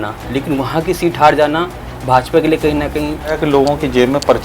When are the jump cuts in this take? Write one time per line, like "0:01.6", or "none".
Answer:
0:03.4

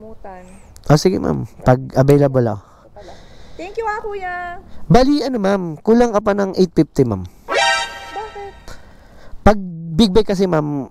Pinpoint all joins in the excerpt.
none

